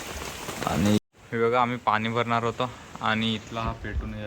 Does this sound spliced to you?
yes; 1 cut; at 1.0 s

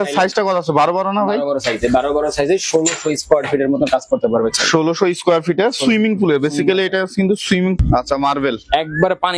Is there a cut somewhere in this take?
yes; 1 cut; at 7.8 s

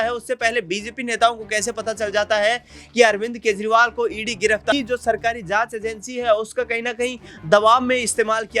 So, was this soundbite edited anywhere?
yes; 1 cut; at 4.7 s

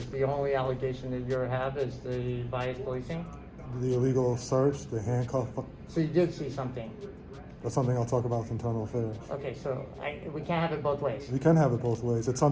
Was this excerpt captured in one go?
yes; 0 cuts

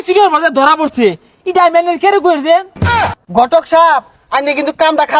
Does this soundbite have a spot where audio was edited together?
yes; 1 cut; at 2.9 s

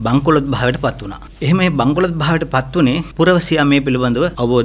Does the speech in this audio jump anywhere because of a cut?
no; 0 cuts

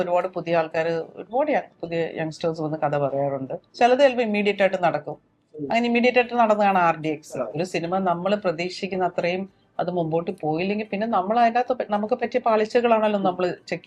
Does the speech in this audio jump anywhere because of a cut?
yes; 2 cuts; at 3.6 s, 7.6 s

